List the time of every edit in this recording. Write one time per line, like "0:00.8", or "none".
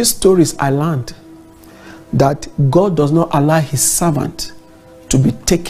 none